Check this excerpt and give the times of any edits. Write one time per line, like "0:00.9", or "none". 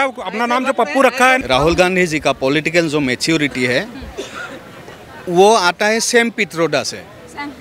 0:01.4